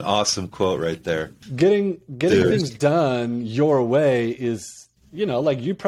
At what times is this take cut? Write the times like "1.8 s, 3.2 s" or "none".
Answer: 1.4 s